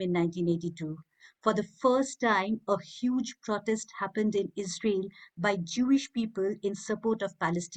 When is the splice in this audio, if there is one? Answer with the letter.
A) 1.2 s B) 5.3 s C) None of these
C